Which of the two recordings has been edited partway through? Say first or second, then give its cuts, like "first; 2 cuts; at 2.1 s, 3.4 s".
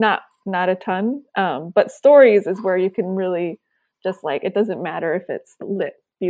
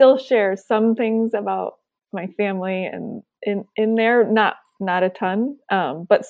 second; 1 cut; at 3.3 s